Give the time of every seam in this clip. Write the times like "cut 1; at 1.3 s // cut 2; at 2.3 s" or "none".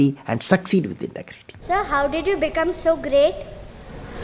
cut 1; at 1.6 s